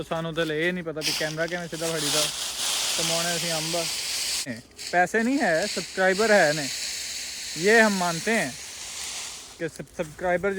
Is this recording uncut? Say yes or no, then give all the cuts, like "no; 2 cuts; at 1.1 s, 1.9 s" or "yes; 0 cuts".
no; 1 cut; at 4.6 s